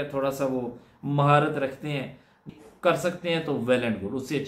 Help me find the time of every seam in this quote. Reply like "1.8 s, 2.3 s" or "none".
2.5 s

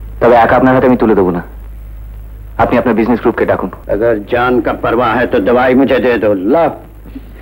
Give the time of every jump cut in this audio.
3.7 s

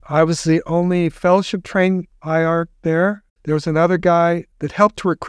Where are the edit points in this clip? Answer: 2.7 s

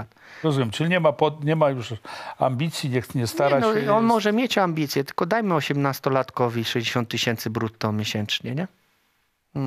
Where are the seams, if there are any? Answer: none

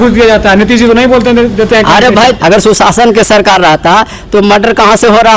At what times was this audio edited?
2.4 s

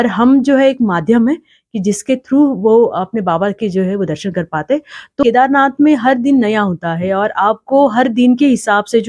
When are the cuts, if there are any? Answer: 5.2 s

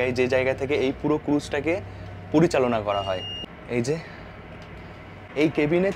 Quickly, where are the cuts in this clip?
none

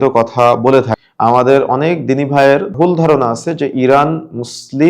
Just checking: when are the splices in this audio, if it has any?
1.0 s, 2.7 s

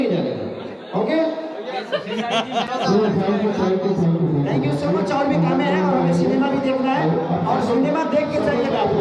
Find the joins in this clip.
none

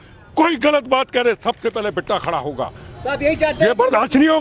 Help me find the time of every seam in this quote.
none

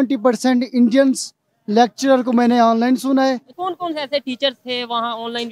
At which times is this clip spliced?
3.5 s

